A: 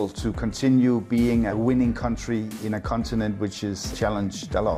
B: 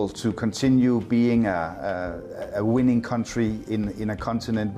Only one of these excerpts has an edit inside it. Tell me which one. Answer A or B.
A